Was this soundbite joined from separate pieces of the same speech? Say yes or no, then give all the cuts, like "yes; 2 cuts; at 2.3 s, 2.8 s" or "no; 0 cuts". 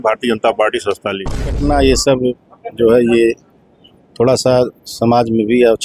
yes; 1 cut; at 1.5 s